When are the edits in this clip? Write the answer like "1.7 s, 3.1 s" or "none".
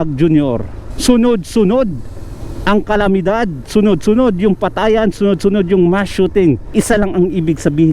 6.6 s